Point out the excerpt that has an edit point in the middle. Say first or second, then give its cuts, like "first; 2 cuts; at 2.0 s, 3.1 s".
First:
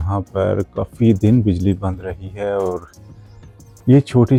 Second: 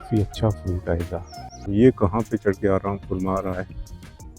second; 1 cut; at 1.7 s